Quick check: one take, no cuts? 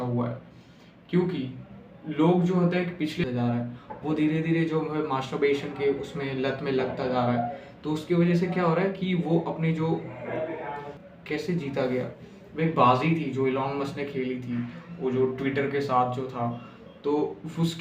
no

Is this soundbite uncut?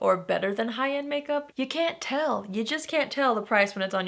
no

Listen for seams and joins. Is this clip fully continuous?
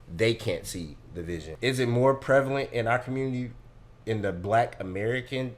no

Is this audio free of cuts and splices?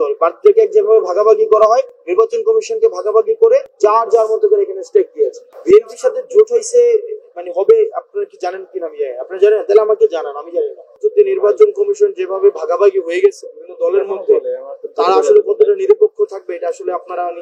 no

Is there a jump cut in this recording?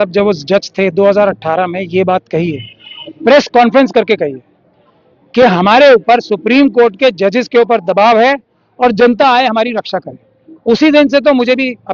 no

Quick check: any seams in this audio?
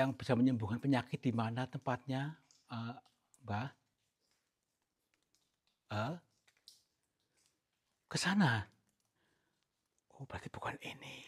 no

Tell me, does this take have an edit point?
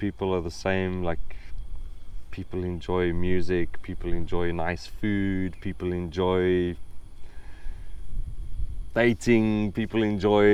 no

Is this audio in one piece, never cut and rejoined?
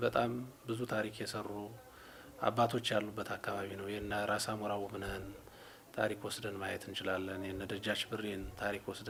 yes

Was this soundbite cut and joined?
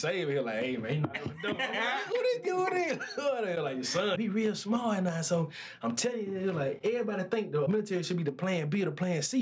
yes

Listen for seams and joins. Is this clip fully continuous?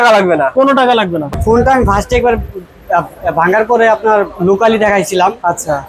no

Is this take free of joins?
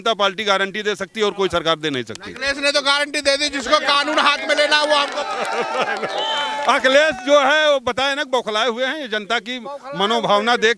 yes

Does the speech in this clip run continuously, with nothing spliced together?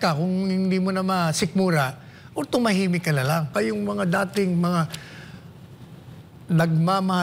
no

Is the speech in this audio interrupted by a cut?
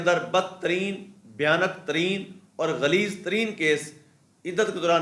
no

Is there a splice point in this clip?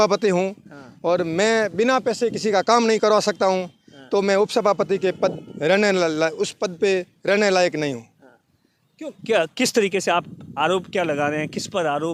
no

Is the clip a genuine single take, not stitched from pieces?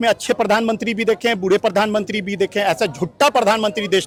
yes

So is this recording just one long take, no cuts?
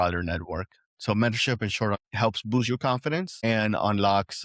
no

